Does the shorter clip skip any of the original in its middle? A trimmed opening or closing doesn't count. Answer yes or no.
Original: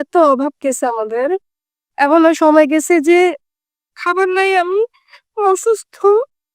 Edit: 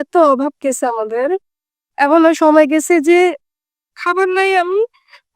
no